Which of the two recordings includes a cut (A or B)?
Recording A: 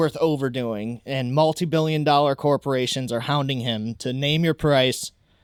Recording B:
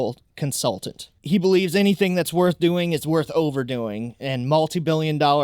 B